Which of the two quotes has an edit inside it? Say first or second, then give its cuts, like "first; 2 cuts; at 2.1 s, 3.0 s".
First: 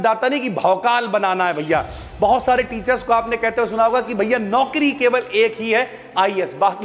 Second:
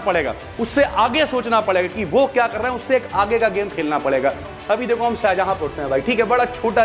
second; 1 cut; at 4.5 s